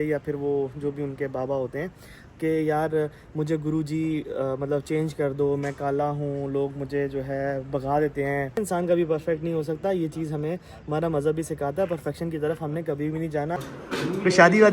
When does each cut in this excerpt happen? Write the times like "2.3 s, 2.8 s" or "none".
8.6 s, 13.6 s